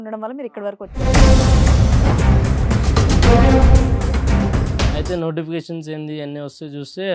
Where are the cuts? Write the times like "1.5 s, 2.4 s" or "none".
1.0 s, 5.0 s

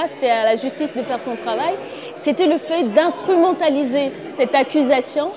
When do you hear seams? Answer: 4.2 s

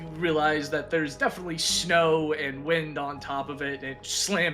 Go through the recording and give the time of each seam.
none

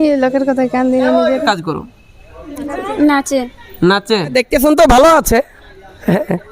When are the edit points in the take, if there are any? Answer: 1.4 s, 4.3 s

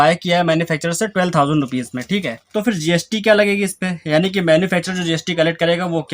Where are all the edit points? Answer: 2.4 s

